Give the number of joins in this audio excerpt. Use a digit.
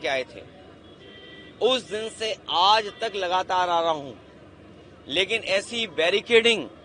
0